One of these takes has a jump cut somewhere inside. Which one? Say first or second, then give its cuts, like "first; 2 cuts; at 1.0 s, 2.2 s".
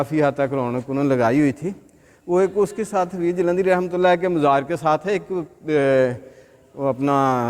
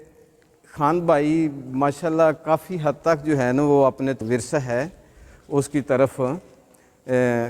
second; 1 cut; at 4.2 s